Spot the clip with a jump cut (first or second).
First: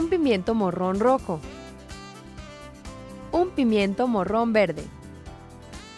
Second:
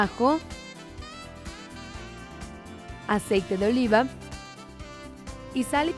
first